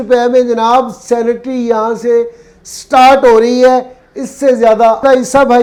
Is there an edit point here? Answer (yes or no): no